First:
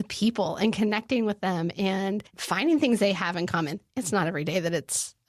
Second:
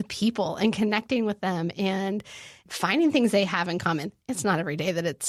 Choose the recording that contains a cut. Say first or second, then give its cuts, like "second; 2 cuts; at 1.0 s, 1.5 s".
first; 1 cut; at 2.3 s